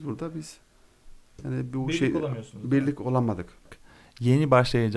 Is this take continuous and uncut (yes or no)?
no